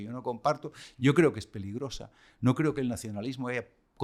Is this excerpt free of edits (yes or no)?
yes